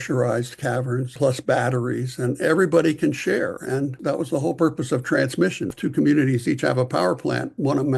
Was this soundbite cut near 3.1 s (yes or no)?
no